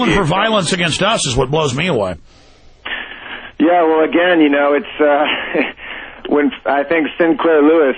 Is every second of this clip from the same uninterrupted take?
no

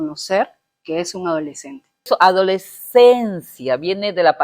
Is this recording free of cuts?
no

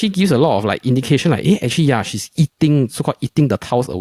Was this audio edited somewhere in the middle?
no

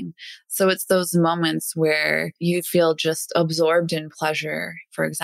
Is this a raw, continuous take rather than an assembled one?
no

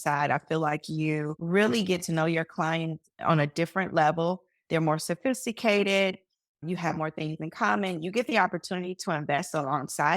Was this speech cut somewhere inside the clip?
yes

